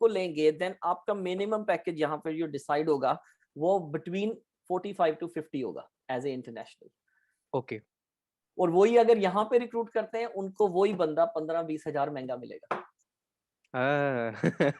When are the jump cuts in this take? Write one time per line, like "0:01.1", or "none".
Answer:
none